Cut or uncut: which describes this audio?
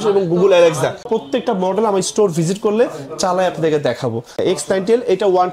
cut